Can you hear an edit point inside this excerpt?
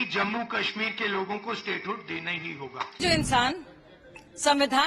yes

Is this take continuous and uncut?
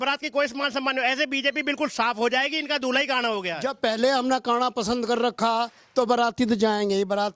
no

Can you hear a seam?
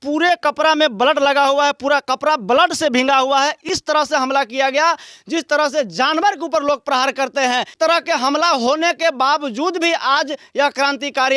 no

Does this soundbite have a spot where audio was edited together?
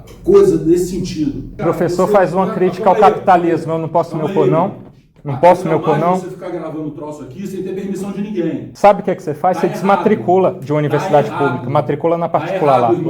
yes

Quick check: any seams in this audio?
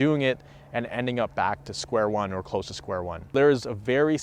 yes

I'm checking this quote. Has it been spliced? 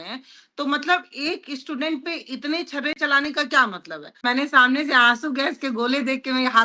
yes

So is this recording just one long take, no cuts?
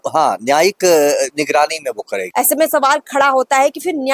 no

